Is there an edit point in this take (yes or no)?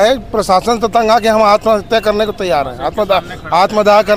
no